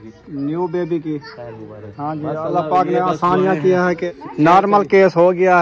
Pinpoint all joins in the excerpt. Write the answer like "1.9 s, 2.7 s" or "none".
4.0 s